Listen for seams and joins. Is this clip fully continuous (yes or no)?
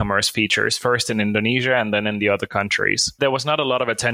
no